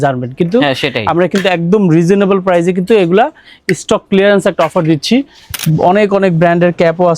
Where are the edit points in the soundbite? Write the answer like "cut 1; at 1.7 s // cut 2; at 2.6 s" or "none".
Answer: cut 1; at 5.5 s